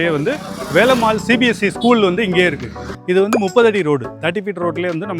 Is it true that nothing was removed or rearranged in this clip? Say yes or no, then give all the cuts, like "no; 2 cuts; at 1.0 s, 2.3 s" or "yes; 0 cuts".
no; 1 cut; at 2.9 s